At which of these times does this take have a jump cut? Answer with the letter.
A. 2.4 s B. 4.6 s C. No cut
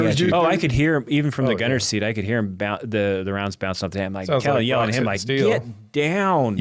C